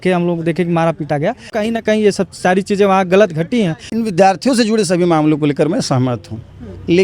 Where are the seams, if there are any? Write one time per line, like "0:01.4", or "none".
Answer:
0:03.8